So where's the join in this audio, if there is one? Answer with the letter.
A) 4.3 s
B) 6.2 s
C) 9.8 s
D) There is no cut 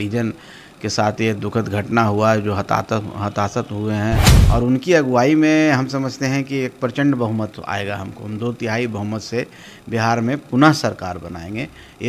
A